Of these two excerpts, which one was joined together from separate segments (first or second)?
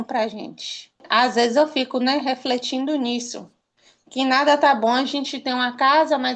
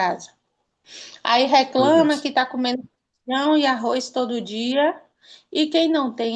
first